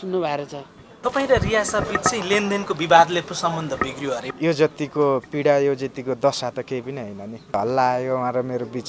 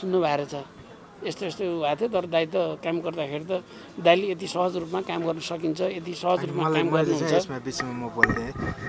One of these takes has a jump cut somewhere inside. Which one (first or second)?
first